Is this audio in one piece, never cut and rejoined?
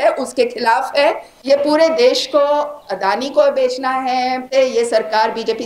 no; 2 cuts; at 1.3 s, 4.5 s

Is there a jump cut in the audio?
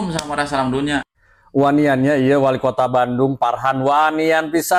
no; 0 cuts

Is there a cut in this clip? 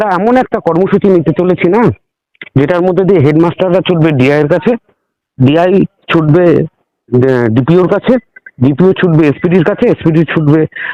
no; 0 cuts

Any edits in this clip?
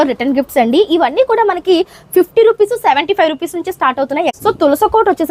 yes; 1 cut; at 4.3 s

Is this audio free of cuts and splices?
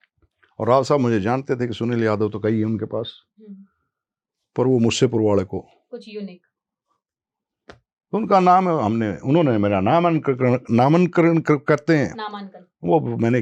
yes; 0 cuts

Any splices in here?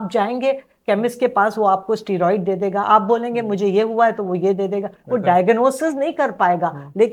no; 0 cuts

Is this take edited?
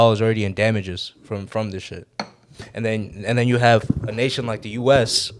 no; 0 cuts

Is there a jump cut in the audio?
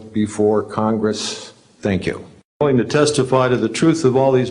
yes; 1 cut; at 2.6 s

